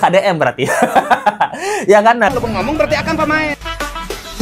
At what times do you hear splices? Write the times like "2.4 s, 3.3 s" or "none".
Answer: 2.3 s

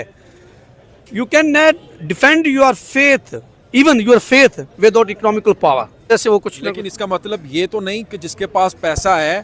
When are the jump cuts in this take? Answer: 6.1 s

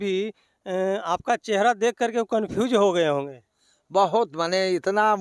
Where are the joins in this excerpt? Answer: none

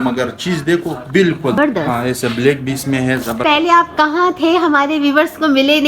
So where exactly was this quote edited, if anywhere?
1.6 s, 3.4 s

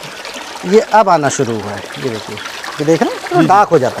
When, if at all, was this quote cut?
none

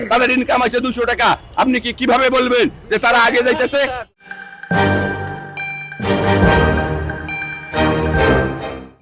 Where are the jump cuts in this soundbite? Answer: none

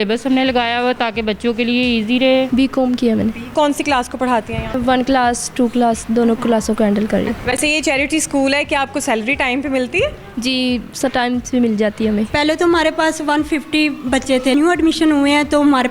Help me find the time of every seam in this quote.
2.5 s, 3.5 s, 4.8 s, 7.4 s, 12.3 s, 14.5 s

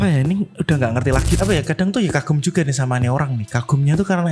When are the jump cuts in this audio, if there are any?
1.3 s

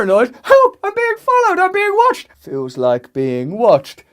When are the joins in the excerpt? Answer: 2.3 s

